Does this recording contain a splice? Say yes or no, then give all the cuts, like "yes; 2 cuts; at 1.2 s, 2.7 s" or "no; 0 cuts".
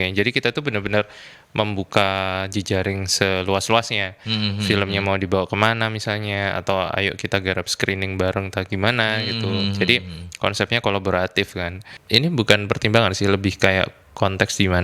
yes; 1 cut; at 11.9 s